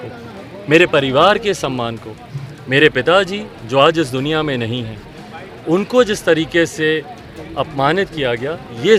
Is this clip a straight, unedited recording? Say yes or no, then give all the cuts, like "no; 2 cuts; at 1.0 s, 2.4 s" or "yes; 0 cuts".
yes; 0 cuts